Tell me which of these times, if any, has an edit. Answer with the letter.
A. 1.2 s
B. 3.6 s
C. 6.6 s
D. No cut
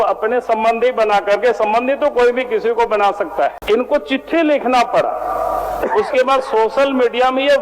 B